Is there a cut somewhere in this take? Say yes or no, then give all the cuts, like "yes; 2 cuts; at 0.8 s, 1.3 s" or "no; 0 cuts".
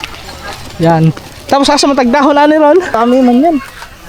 yes; 1 cut; at 3.0 s